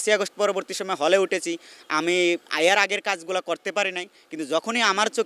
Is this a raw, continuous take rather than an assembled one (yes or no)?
yes